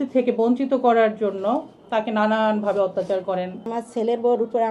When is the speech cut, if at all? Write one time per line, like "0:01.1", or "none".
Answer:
0:03.7